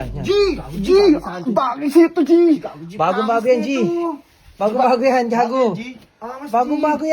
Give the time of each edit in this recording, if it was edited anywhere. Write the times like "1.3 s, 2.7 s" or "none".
none